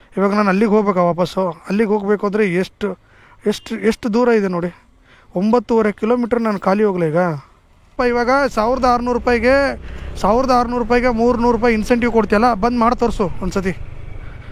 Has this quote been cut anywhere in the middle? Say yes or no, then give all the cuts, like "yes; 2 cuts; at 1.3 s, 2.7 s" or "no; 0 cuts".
yes; 1 cut; at 7.9 s